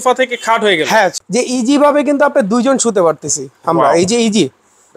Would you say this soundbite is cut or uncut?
cut